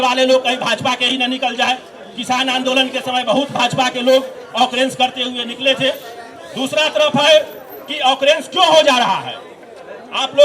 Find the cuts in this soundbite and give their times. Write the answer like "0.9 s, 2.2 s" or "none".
none